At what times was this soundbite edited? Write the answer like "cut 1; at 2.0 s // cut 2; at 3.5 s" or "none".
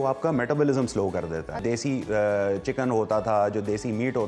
cut 1; at 1.6 s